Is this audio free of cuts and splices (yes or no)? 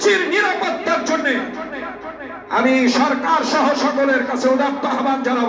yes